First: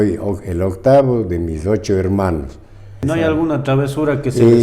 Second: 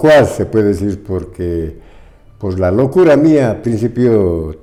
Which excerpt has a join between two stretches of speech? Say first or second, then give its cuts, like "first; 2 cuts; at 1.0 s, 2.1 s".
first; 1 cut; at 2.9 s